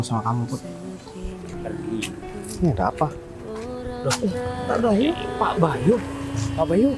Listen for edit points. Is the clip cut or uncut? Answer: cut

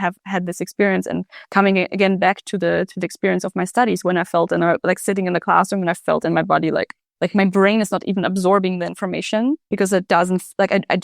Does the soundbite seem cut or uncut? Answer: cut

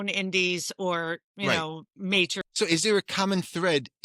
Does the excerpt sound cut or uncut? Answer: uncut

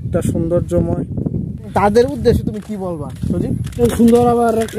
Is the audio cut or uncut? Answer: cut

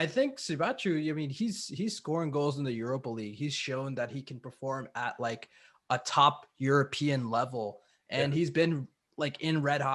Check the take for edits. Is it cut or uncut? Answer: uncut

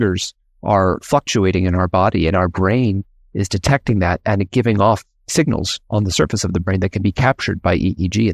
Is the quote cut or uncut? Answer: uncut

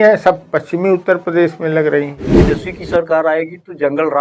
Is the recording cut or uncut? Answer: cut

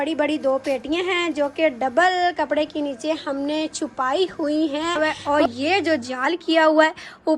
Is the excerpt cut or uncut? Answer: cut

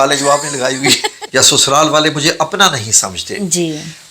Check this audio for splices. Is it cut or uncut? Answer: cut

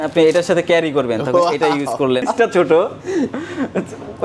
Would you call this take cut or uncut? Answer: cut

